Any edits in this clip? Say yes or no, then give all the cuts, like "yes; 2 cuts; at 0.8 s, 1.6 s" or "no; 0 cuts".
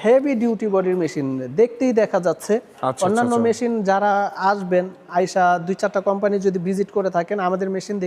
no; 0 cuts